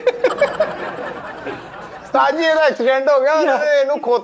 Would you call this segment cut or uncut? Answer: cut